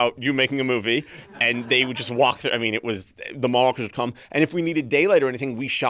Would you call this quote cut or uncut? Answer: uncut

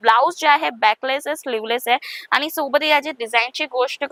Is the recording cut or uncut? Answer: uncut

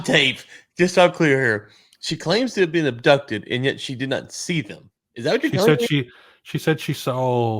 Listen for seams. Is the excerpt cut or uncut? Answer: uncut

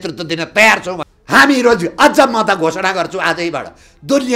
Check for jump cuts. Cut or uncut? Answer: cut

